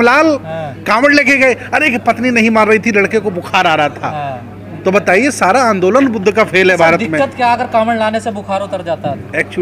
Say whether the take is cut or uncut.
uncut